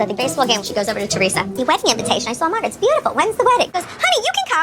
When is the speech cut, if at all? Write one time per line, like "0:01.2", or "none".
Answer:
0:03.7